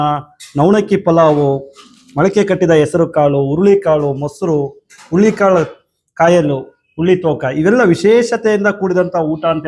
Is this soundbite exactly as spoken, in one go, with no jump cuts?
yes; 0 cuts

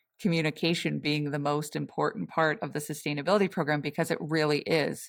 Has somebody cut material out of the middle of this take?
no; 0 cuts

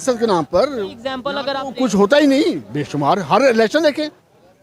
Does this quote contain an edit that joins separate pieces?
no; 0 cuts

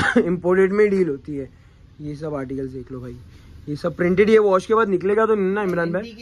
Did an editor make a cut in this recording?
no; 0 cuts

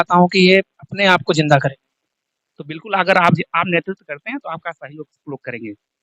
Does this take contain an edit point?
no; 0 cuts

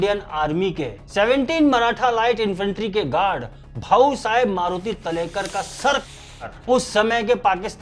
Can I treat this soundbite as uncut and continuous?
yes; 0 cuts

